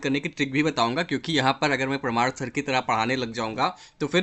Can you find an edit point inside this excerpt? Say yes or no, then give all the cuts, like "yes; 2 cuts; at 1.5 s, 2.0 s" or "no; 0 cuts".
no; 0 cuts